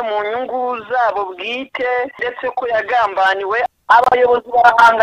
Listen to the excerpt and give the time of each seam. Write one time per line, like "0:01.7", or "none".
0:02.2
0:03.7